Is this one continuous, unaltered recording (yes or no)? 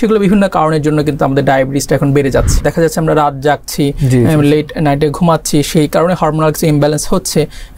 no